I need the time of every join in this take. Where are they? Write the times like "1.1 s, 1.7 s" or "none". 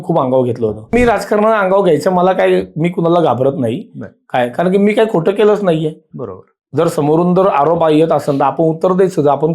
0.9 s